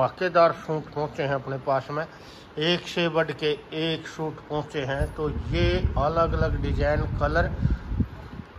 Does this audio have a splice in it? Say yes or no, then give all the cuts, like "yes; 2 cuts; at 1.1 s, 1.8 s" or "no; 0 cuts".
no; 0 cuts